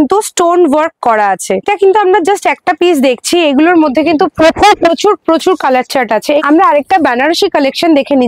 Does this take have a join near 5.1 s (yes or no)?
no